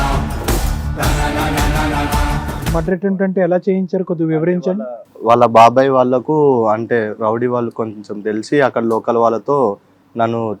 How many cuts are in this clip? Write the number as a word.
one